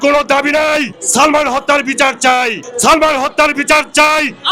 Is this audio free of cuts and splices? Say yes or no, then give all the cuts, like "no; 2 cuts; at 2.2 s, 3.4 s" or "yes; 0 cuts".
no; 2 cuts; at 1.0 s, 2.6 s